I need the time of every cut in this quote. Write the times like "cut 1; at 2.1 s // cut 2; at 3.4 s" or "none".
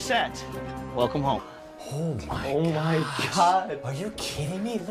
none